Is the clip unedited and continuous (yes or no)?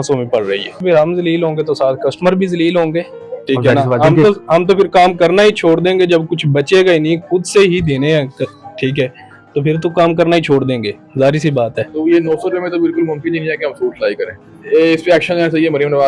no